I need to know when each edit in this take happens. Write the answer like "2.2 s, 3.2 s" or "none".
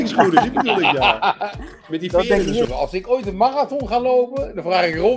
2.7 s